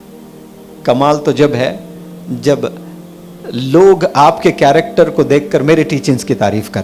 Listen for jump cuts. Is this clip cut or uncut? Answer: uncut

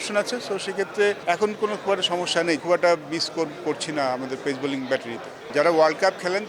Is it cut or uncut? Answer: cut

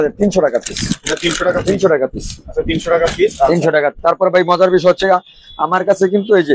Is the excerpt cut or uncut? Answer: uncut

